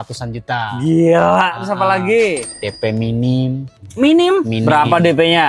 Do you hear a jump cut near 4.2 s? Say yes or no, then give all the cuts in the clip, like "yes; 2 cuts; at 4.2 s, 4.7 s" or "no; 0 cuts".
no; 1 cut; at 2.5 s